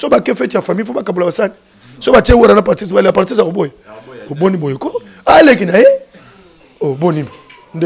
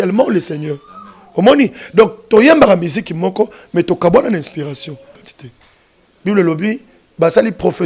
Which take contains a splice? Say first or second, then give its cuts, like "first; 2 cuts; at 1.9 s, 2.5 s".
second; 1 cut; at 5.2 s